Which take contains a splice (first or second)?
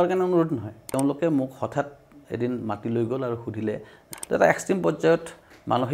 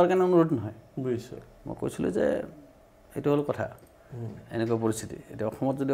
first